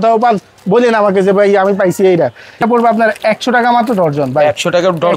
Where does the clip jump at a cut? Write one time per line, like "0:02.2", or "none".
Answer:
0:02.6